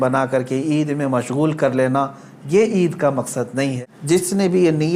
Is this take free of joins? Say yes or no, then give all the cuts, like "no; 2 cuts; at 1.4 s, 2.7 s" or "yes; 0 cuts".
no; 1 cut; at 3.9 s